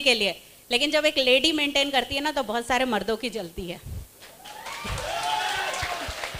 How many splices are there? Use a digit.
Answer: 0